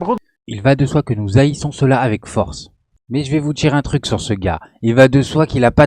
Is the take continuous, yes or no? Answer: yes